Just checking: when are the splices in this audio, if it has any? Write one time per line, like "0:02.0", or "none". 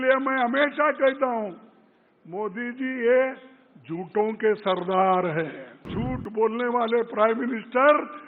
0:05.9